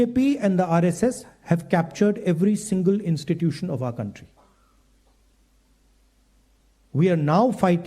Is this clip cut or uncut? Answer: uncut